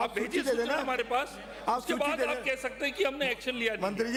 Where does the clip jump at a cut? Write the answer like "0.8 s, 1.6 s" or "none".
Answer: none